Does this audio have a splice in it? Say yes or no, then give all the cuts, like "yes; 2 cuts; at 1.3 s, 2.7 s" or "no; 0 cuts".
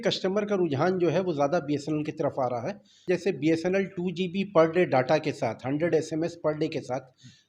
yes; 1 cut; at 3.0 s